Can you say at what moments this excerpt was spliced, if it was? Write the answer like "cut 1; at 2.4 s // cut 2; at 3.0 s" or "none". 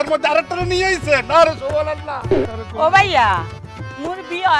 cut 1; at 2.5 s